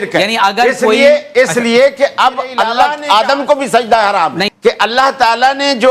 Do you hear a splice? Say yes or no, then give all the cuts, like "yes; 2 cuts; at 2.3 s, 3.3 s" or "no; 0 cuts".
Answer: yes; 2 cuts; at 2.7 s, 4.5 s